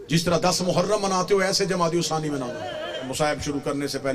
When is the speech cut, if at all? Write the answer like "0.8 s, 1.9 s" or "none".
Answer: 3.1 s